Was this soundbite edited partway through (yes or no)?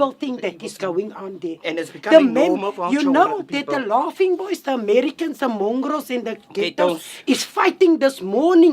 yes